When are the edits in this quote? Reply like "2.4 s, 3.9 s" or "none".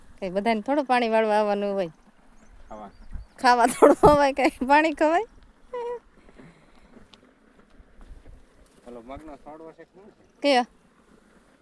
none